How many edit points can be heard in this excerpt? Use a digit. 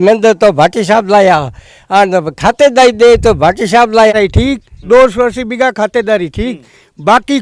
1